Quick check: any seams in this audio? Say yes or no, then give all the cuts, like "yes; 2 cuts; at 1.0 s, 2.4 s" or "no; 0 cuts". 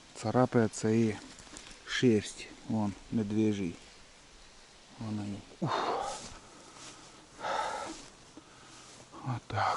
yes; 1 cut; at 5.6 s